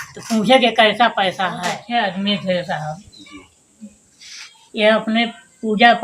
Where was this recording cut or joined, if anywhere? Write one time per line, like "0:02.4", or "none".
0:01.7